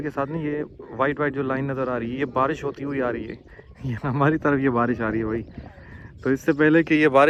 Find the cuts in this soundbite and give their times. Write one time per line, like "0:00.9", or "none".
none